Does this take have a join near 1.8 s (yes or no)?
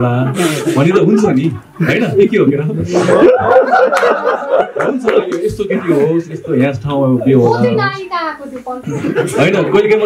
no